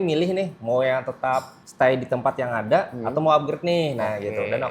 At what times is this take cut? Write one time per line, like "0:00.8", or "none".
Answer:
0:01.6